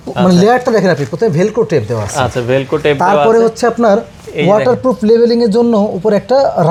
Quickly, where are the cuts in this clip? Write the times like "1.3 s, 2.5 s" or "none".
none